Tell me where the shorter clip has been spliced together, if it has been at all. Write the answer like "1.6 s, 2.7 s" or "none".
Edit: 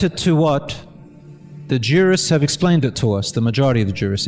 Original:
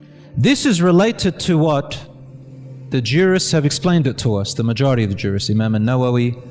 none